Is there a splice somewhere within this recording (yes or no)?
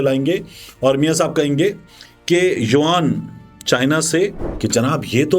yes